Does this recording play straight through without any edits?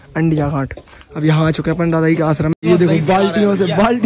no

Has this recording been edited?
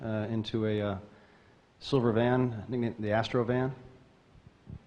no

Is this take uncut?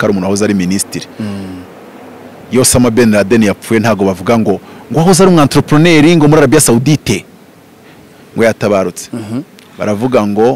yes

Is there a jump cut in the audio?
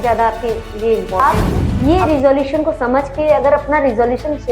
yes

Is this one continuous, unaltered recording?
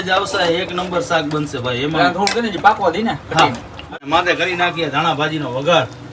no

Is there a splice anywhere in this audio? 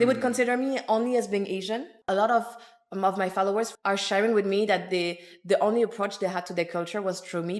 yes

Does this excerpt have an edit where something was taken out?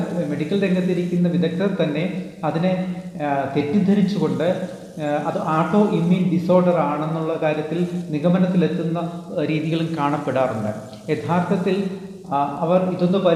no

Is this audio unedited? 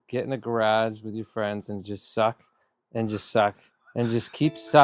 yes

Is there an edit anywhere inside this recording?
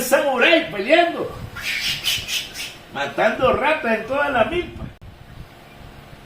yes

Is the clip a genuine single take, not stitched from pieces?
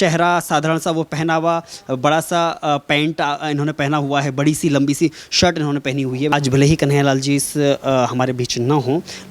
no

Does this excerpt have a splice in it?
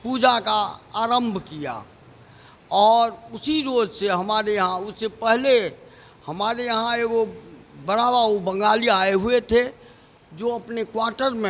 no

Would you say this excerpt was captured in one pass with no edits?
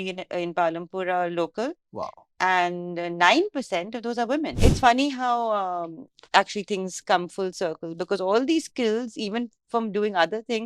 no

